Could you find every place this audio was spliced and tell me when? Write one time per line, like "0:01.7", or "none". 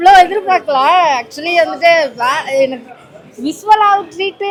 none